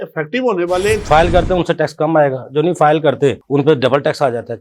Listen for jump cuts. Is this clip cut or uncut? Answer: cut